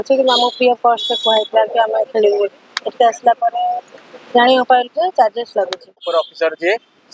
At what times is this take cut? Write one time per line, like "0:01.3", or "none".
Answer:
0:06.0